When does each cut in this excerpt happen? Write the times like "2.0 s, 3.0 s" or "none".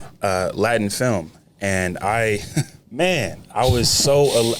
none